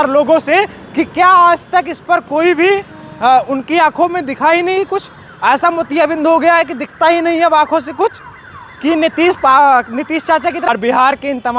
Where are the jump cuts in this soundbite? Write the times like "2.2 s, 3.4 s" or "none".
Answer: 10.7 s